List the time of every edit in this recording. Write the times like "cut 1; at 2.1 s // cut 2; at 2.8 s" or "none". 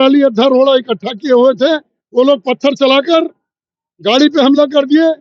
none